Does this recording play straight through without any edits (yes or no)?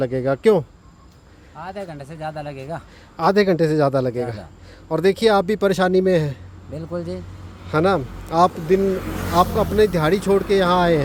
yes